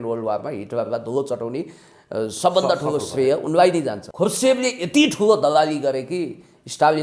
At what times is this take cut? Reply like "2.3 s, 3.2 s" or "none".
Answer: 4.0 s